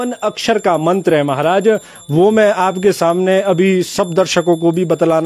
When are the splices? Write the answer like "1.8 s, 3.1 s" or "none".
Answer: none